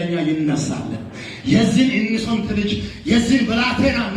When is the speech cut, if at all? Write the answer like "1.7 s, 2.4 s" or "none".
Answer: 1.8 s